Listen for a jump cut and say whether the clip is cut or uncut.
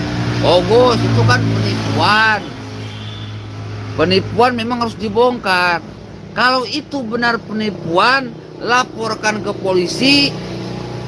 uncut